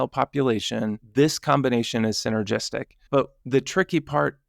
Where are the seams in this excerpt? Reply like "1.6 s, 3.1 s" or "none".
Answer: 1.0 s, 3.4 s